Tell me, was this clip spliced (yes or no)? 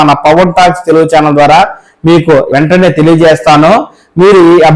yes